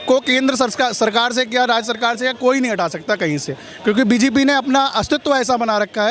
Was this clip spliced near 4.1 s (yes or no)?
no